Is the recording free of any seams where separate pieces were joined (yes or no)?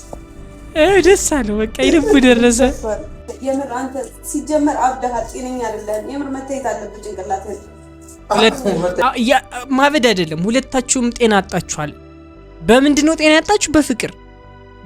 no